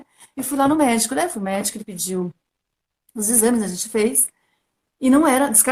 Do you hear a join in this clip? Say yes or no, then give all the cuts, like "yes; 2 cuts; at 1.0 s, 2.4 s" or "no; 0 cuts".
no; 0 cuts